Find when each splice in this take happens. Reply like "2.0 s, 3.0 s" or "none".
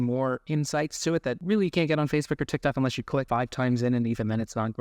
1.4 s, 3.3 s

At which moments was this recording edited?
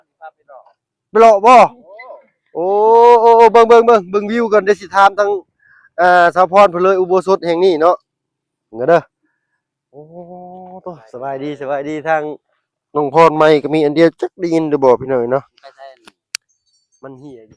none

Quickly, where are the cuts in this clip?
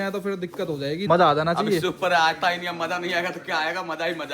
1.0 s

